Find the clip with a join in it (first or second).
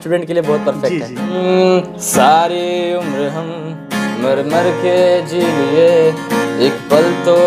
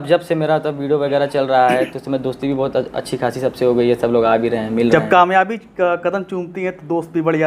first